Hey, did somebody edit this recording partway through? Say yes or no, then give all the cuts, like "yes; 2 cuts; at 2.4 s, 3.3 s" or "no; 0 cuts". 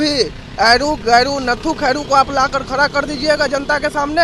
no; 0 cuts